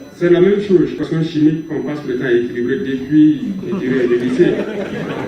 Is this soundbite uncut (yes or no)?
no